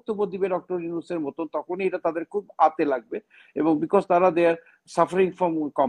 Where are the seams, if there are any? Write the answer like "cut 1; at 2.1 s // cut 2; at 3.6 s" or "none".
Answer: none